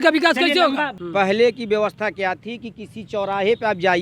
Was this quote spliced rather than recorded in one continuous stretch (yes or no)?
yes